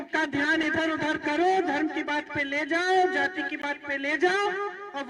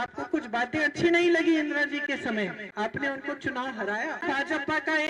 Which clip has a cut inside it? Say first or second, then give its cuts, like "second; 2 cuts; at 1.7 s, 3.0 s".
second; 2 cuts; at 2.6 s, 4.2 s